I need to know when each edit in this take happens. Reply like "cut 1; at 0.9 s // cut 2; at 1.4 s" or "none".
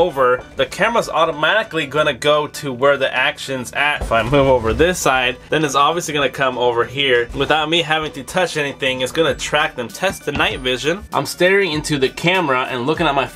cut 1; at 4.0 s // cut 2; at 5.4 s // cut 3; at 7.3 s // cut 4; at 9.9 s // cut 5; at 11.0 s